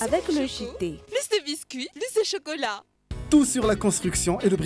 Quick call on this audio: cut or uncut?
uncut